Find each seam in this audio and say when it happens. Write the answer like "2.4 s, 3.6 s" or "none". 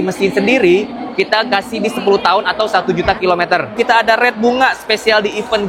3.7 s

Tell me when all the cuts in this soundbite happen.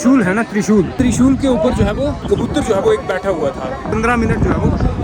0.9 s, 2.2 s, 3.9 s

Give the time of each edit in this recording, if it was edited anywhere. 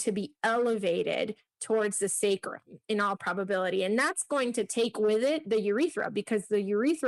none

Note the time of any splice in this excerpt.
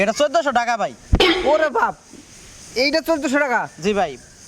none

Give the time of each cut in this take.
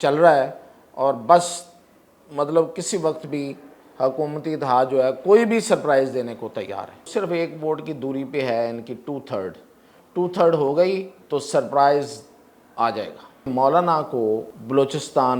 6.9 s, 11.1 s, 13.5 s, 14.5 s

